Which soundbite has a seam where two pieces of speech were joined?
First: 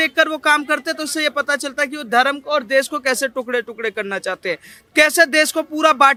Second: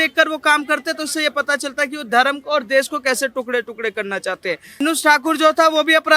second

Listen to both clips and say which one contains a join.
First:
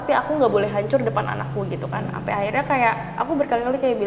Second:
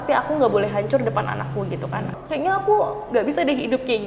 second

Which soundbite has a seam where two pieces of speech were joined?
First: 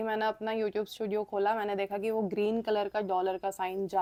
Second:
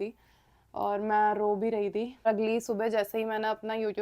second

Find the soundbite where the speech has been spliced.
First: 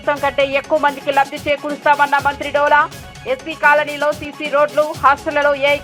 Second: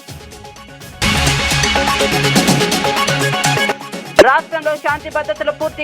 second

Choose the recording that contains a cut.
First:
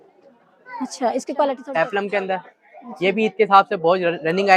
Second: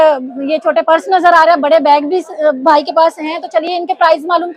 first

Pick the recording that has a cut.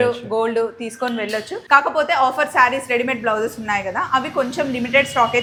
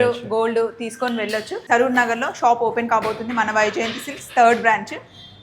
second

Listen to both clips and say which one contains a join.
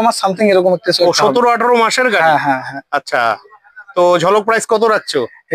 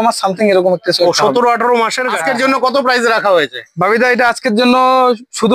second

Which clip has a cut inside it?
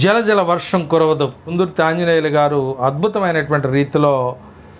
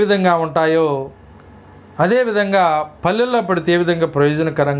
first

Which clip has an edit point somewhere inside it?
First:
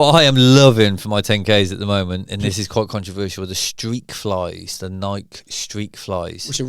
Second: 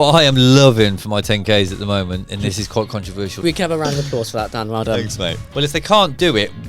second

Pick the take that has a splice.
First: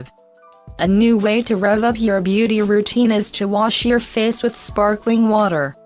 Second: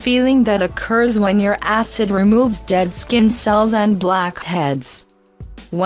first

